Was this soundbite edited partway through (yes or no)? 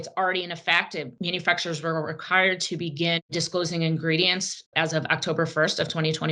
yes